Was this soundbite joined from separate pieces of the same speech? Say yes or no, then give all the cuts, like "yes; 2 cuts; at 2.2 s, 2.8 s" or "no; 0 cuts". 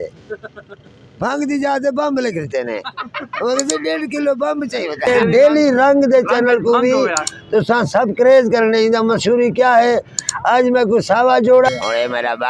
yes; 2 cuts; at 5.1 s, 11.7 s